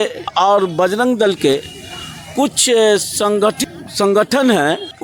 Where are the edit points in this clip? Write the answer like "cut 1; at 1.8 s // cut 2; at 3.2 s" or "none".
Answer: none